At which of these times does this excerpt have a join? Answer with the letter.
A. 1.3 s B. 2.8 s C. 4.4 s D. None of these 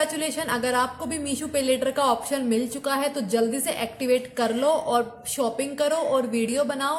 D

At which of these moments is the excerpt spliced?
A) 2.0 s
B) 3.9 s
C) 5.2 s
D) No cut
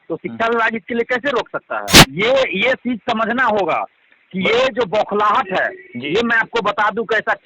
A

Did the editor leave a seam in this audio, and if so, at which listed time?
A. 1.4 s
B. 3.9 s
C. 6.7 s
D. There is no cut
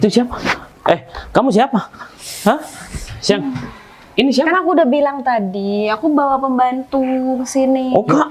D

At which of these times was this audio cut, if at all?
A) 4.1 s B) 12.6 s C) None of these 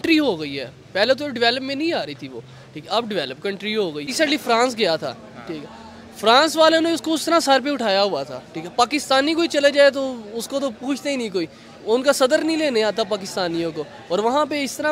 A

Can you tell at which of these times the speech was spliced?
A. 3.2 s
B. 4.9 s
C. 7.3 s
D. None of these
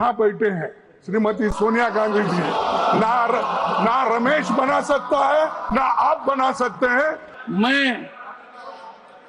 C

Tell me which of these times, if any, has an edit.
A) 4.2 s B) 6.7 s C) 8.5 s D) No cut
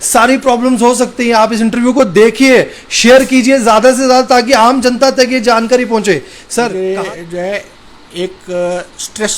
B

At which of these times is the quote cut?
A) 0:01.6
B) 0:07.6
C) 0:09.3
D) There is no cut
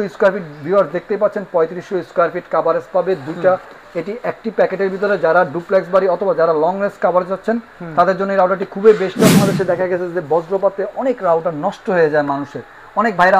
C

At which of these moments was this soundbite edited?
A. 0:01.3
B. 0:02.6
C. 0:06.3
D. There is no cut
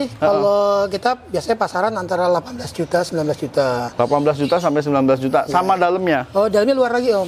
D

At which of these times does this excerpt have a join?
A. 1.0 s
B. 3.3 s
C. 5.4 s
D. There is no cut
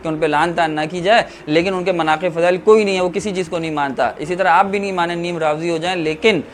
D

